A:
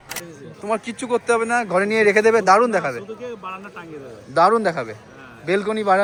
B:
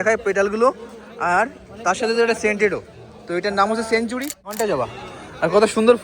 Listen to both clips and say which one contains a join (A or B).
B